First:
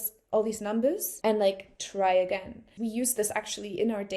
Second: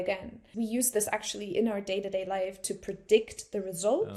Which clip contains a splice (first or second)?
first